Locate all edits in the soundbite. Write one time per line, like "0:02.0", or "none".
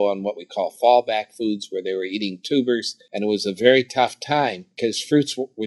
0:03.0
0:04.7